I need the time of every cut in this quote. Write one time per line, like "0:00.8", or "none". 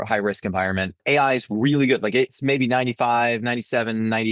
0:01.0
0:02.3